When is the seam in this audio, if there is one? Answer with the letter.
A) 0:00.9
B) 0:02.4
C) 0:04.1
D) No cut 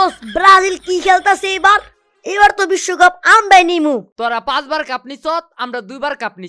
C